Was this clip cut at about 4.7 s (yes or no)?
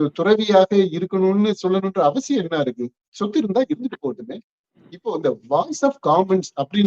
yes